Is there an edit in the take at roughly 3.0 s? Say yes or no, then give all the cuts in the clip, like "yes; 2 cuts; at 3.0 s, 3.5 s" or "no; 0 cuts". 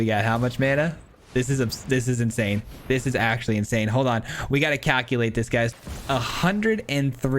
no; 1 cut; at 5.7 s